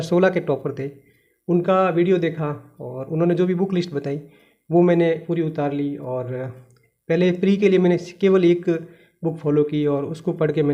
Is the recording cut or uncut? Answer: uncut